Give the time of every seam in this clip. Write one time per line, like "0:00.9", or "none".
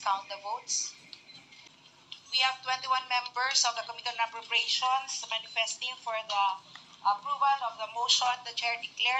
0:01.6